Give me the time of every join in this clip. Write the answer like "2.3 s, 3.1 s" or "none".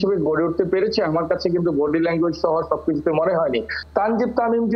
3.7 s